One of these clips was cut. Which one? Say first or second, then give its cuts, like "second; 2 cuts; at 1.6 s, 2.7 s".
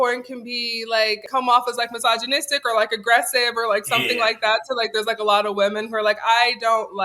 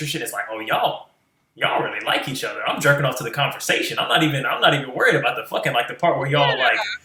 first; 1 cut; at 1.3 s